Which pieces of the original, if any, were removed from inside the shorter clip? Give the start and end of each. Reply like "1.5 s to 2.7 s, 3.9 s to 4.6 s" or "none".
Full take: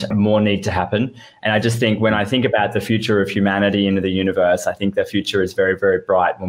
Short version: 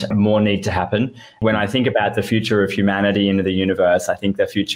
1.4 s to 2.0 s